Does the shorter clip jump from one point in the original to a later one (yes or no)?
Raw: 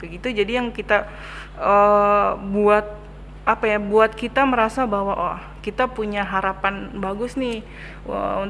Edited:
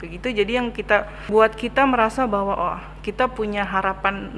yes